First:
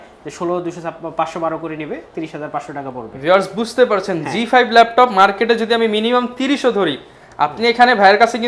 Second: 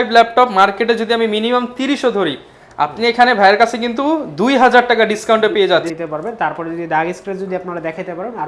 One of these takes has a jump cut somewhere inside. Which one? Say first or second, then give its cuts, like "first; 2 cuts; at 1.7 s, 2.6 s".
second; 1 cut; at 5.9 s